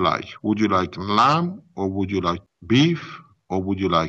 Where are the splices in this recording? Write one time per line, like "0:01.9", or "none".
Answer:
0:02.5